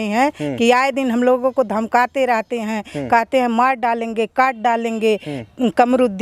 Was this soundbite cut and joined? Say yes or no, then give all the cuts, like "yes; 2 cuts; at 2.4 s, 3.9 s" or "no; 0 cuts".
no; 0 cuts